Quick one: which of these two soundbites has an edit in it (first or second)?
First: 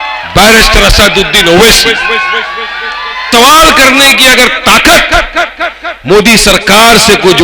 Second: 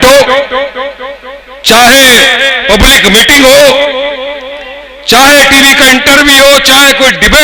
first